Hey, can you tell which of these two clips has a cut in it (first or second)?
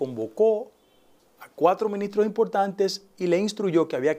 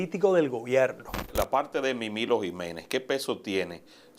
second